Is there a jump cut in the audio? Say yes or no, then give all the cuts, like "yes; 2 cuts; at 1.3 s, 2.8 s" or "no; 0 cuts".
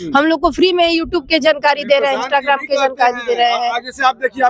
no; 0 cuts